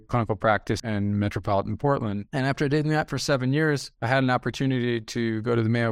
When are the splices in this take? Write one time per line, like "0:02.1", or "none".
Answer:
0:00.8
0:02.2